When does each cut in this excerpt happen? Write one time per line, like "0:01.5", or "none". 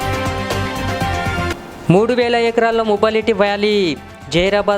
0:01.5